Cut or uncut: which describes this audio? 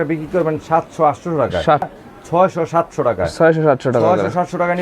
cut